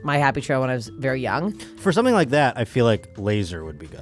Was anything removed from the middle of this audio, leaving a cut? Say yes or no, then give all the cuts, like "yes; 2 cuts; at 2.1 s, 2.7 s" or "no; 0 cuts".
no; 0 cuts